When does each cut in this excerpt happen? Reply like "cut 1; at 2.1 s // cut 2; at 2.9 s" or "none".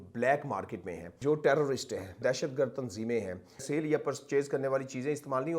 cut 1; at 1.2 s // cut 2; at 2.2 s // cut 3; at 3.6 s